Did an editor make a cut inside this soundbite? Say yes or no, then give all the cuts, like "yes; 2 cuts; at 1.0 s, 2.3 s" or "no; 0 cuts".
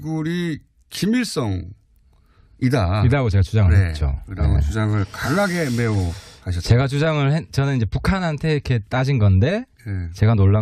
yes; 1 cut; at 8.9 s